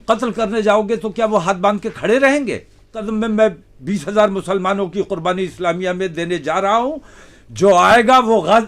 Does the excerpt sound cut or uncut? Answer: cut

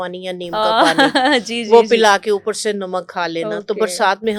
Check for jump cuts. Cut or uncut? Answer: uncut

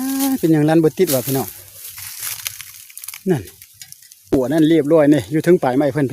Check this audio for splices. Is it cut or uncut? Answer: cut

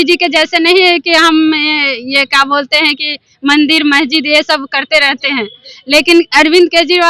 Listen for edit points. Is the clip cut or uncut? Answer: uncut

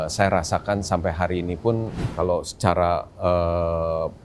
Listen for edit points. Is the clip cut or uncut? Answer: cut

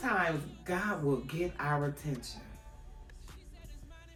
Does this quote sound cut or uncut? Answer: uncut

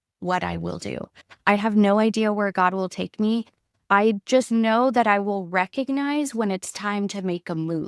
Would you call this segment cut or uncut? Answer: uncut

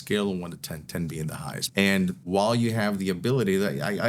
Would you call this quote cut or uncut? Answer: cut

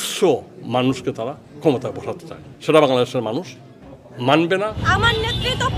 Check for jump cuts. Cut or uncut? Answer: cut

